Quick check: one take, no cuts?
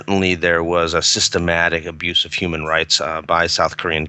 yes; 0 cuts

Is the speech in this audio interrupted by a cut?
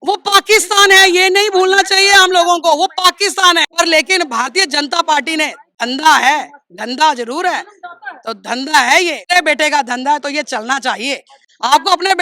yes; 2 cuts; at 3.7 s, 9.3 s

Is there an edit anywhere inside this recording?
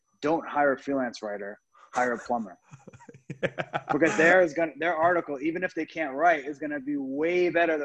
no; 0 cuts

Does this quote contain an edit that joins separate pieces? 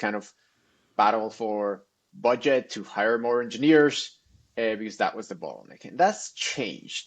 no; 0 cuts

